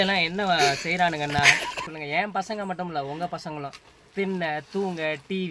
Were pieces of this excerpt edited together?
no; 0 cuts

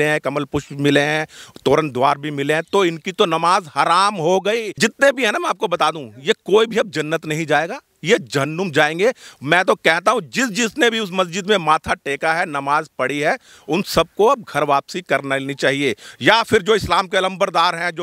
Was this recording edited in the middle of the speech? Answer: yes; 1 cut; at 4.7 s

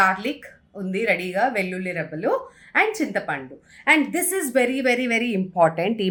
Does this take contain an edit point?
no; 0 cuts

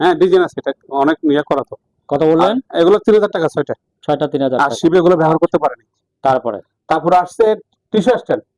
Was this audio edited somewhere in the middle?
no; 0 cuts

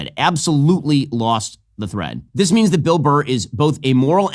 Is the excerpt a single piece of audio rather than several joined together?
no; 1 cut; at 2.2 s

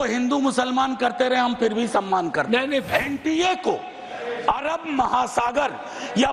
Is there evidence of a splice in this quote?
yes; 1 cut; at 2.9 s

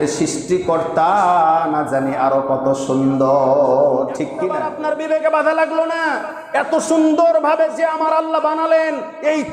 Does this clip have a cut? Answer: yes; 1 cut; at 4.6 s

